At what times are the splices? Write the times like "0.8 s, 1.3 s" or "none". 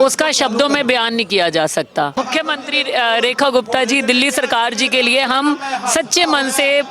2.1 s